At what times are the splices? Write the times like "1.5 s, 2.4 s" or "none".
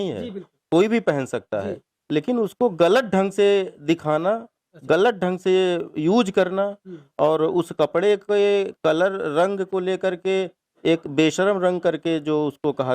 none